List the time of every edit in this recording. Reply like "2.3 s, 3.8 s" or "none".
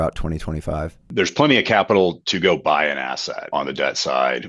1.0 s, 3.4 s

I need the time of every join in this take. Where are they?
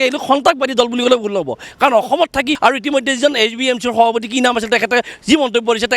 2.5 s

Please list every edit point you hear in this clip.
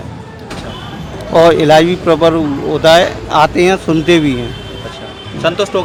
none

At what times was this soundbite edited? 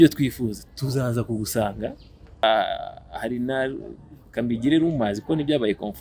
2.4 s

